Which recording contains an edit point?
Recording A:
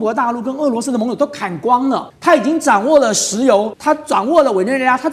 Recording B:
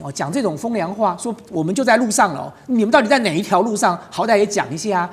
A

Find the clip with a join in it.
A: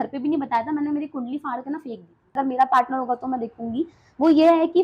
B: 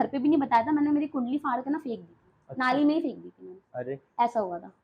A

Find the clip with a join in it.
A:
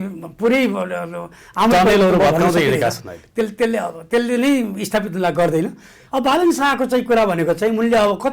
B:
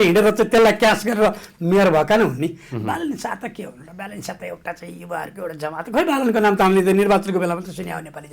A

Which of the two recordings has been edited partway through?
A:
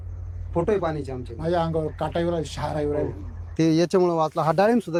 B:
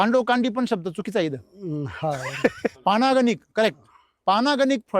B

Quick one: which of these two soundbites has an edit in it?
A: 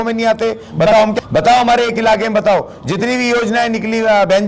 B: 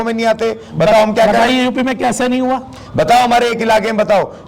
A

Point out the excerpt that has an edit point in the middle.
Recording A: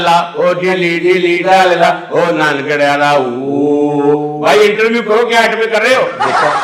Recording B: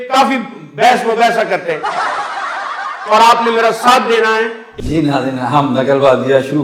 B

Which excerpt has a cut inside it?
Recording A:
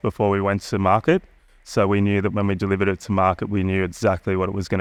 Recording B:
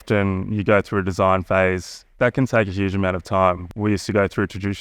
B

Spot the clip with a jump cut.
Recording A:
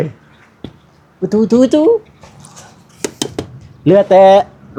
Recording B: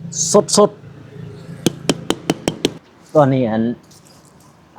B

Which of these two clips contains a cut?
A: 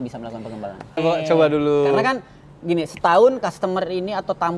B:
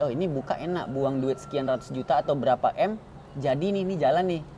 A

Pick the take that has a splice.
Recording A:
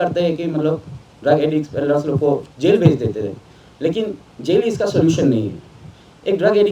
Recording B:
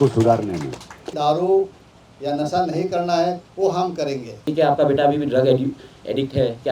B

